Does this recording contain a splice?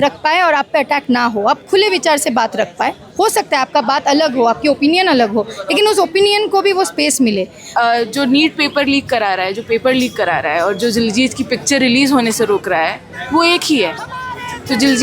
yes; 1 cut; at 7.7 s

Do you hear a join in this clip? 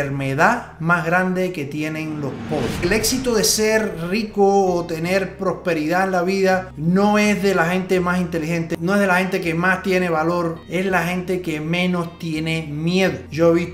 yes; 1 cut; at 2.8 s

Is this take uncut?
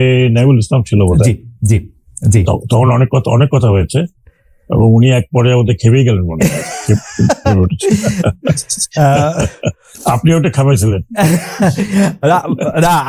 yes; 0 cuts

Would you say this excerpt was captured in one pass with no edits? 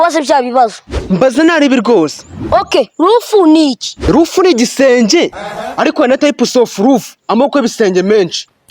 yes; 0 cuts

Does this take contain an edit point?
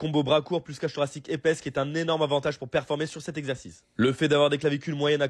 no; 0 cuts

